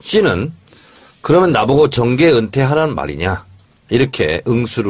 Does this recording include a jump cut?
yes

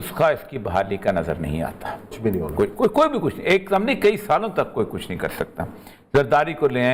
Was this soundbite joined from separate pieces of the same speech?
no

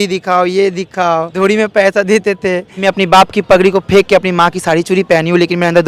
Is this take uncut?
no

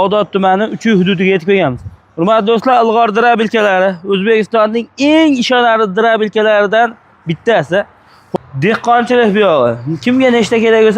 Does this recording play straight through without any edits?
no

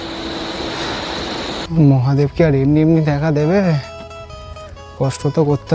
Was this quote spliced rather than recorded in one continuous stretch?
yes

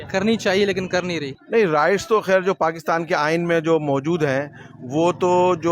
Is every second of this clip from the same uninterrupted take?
no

